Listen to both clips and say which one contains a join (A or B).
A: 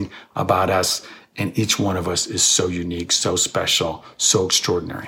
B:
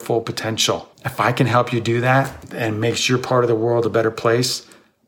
B